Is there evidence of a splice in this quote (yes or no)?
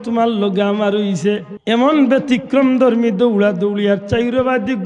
yes